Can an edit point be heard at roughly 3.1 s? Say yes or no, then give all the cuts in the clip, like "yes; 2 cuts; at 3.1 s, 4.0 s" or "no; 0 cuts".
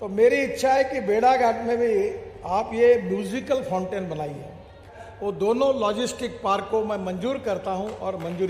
no; 1 cut; at 5.0 s